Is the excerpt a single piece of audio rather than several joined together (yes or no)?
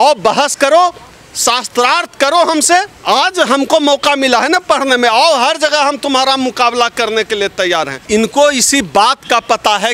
no